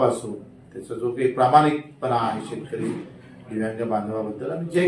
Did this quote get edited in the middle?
no; 0 cuts

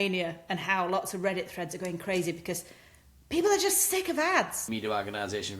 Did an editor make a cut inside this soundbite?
yes; 1 cut; at 4.6 s

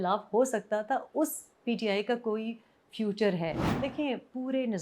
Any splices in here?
yes; 1 cut; at 3.5 s

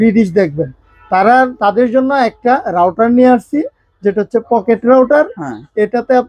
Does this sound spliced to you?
no; 0 cuts

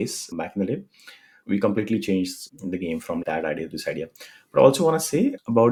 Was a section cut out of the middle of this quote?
no; 0 cuts

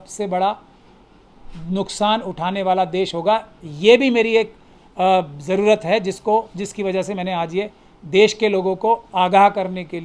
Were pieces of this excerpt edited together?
no; 0 cuts

